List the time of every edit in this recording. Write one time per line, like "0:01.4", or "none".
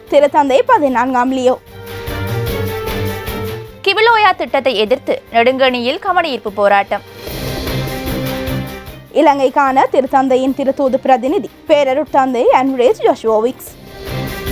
0:02.0
0:03.6